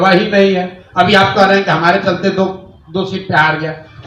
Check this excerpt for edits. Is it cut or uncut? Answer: uncut